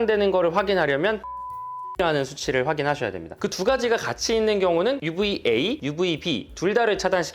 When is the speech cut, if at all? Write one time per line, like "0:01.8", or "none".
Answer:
0:03.4